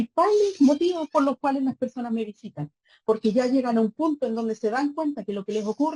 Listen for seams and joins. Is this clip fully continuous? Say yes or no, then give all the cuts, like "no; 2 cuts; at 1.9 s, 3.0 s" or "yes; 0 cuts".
yes; 0 cuts